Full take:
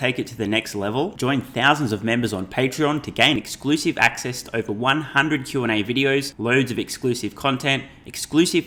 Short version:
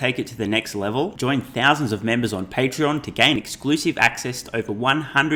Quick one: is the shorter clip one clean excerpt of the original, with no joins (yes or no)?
yes